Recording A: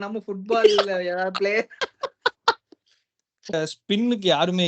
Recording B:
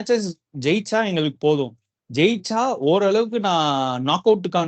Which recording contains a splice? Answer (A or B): A